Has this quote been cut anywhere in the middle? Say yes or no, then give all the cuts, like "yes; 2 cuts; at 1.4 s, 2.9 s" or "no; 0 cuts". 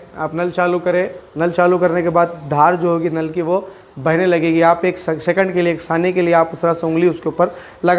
no; 0 cuts